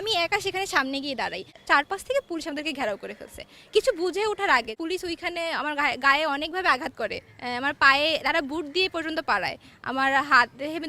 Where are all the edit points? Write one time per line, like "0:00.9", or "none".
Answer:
0:01.6
0:04.7